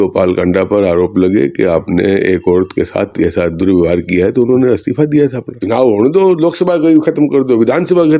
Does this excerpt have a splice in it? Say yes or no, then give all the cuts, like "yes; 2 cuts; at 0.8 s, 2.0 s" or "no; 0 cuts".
yes; 1 cut; at 5.6 s